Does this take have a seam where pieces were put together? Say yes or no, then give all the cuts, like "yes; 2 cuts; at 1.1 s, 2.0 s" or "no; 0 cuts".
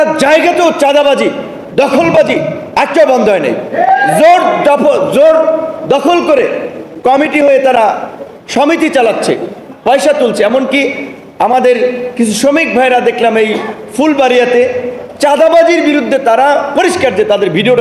no; 0 cuts